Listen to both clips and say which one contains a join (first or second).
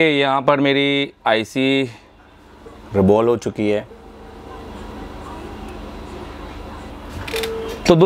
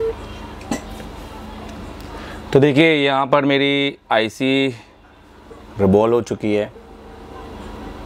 first